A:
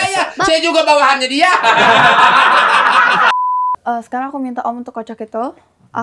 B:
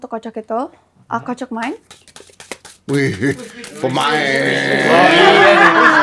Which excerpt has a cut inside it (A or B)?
A